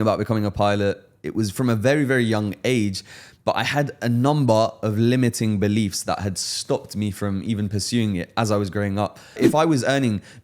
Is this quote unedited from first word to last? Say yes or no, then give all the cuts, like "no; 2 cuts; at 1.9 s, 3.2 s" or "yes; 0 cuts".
no; 1 cut; at 9.4 s